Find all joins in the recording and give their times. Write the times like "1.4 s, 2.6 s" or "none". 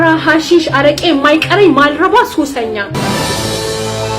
2.9 s